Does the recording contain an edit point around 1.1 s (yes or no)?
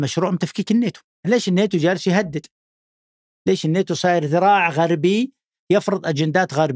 yes